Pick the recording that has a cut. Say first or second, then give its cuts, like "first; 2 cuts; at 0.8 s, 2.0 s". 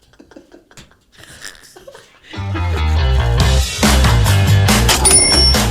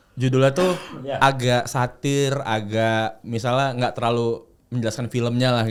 first; 1 cut; at 2.6 s